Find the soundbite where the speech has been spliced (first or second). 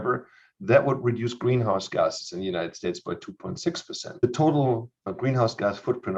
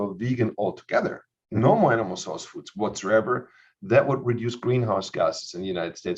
first